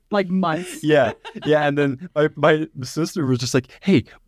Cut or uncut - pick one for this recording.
uncut